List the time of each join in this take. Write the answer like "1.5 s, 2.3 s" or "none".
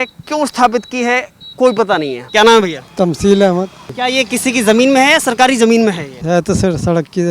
2.2 s, 3.9 s, 6.1 s

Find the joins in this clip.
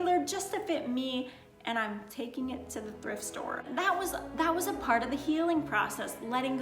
3.6 s

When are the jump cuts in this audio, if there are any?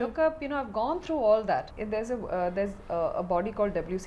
1.7 s

